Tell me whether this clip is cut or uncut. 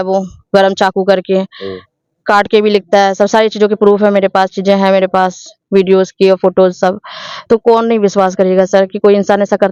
uncut